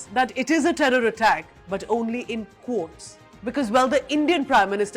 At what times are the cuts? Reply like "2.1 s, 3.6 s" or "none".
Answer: 1.5 s